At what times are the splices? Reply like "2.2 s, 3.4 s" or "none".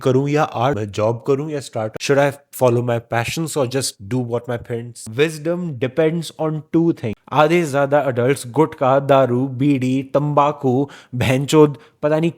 4.9 s, 7.1 s